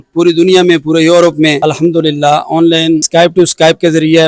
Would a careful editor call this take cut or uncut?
cut